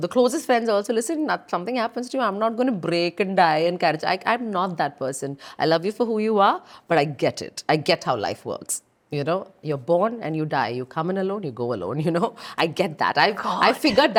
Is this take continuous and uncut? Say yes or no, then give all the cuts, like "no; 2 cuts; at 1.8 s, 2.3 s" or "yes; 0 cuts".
yes; 0 cuts